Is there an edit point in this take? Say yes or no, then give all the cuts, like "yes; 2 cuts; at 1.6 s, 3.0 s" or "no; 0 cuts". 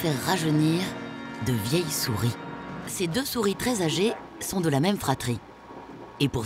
yes; 1 cut; at 2.8 s